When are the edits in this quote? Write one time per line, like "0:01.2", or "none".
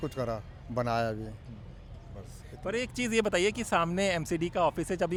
none